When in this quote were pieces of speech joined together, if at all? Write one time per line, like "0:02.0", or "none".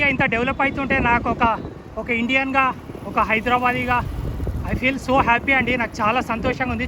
none